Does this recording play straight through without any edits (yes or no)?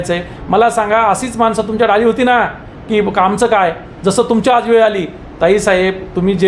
yes